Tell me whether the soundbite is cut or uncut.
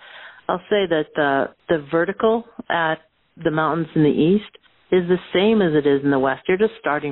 cut